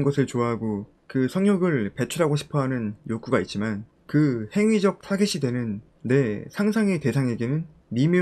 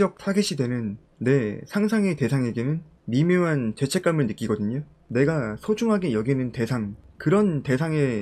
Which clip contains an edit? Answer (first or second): second